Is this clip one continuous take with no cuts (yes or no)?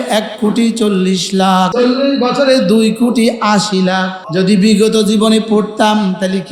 no